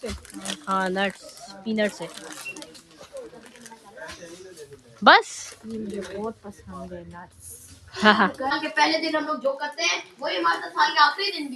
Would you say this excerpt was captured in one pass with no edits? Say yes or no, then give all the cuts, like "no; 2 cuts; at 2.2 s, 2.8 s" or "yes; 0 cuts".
no; 1 cut; at 8.5 s